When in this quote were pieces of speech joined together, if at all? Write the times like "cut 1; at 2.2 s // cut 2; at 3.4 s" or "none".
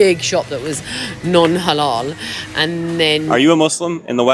cut 1; at 3.3 s